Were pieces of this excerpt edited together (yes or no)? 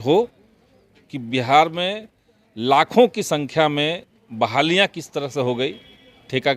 no